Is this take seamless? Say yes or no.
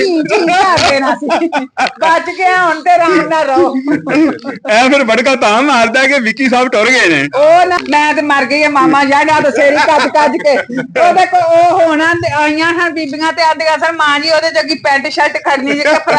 no